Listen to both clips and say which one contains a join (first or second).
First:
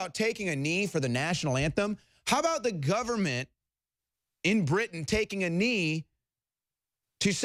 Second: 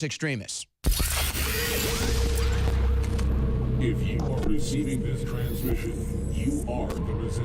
second